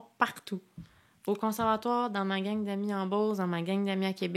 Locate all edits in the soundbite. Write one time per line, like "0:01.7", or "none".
none